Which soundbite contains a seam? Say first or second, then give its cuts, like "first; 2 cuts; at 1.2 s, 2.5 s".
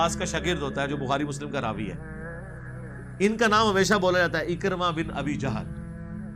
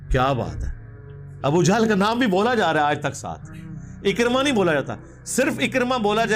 first; 3 cuts; at 2.0 s, 3.2 s, 5.5 s